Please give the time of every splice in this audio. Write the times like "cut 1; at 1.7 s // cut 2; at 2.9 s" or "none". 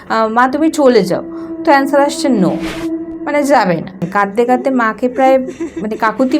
cut 1; at 4.1 s